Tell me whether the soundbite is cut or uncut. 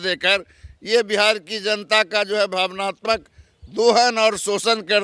uncut